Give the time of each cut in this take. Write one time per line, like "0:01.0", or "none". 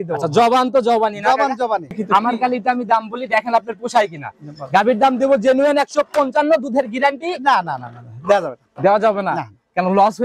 0:01.9